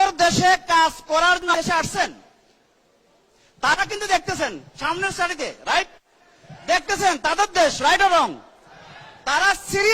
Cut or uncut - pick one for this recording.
cut